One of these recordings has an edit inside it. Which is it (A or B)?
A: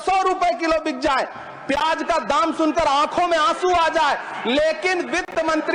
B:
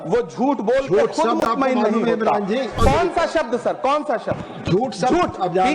B